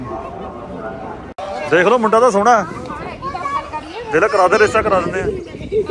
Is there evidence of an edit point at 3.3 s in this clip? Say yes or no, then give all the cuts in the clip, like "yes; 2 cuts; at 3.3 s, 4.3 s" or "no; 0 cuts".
no; 1 cut; at 1.3 s